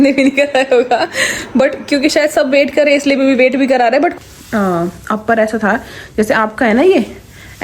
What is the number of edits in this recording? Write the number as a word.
one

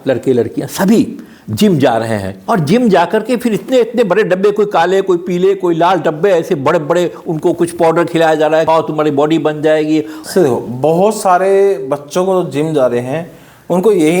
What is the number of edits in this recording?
three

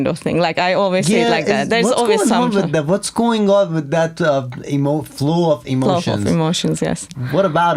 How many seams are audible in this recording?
zero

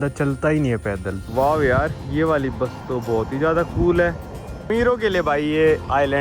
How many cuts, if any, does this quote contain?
two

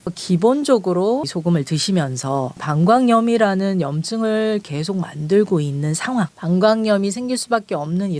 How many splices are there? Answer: one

